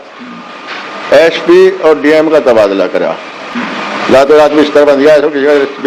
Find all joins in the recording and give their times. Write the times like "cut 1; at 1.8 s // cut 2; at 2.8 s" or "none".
none